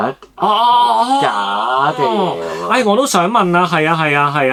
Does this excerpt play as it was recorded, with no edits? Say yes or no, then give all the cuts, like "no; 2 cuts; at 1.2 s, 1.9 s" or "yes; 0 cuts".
yes; 0 cuts